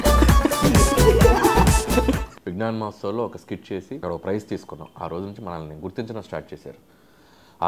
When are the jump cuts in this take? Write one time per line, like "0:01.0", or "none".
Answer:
0:02.3
0:04.0